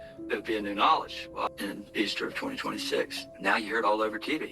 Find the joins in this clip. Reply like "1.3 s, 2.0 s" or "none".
1.5 s, 3.2 s